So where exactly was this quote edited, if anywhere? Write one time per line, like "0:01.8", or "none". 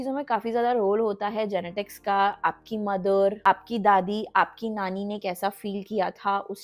none

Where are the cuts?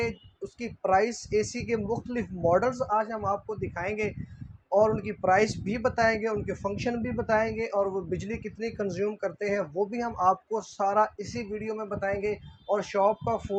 none

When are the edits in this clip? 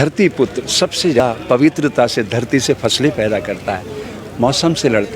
0:01.2

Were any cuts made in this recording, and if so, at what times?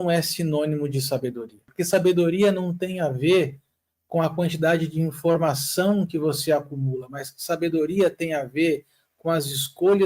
0:01.7

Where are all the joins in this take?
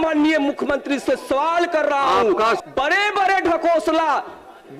0:02.6

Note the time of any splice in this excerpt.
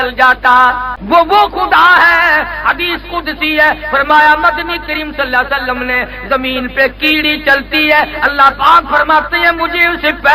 0:01.0

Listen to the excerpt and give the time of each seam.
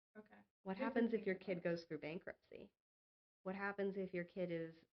none

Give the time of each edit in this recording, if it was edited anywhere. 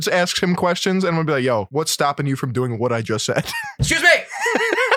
0:01.7

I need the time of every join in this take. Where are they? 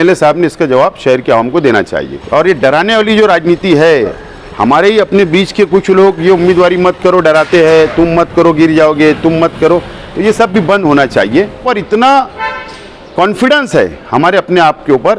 0:02.1
0:11.6

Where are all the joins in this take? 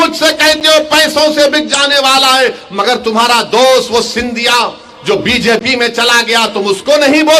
none

